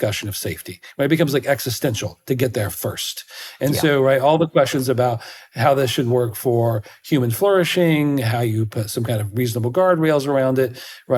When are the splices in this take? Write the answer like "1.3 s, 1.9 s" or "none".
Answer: none